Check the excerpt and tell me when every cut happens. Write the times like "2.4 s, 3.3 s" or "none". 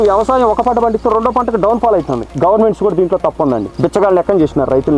2.3 s, 3.7 s